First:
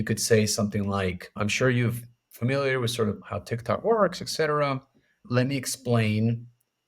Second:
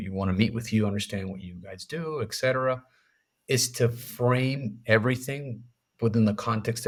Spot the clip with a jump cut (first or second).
first